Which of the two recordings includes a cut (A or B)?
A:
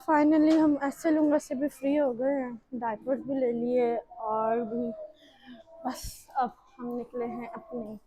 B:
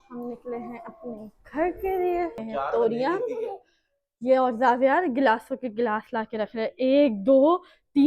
B